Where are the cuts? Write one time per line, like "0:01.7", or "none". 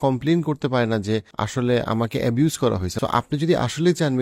0:01.4
0:02.9